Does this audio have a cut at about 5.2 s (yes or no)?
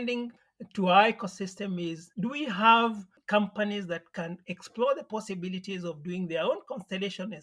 no